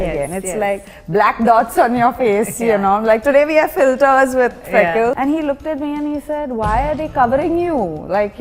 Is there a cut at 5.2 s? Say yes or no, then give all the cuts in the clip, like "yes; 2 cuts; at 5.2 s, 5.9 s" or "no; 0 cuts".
yes; 1 cut; at 5.2 s